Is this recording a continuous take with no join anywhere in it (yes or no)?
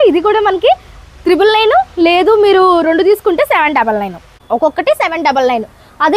no